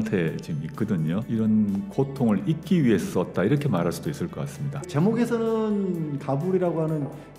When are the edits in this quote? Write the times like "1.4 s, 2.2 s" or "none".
1.3 s, 4.8 s